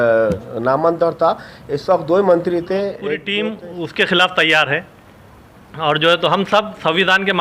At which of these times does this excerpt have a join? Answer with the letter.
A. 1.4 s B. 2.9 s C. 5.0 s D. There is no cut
B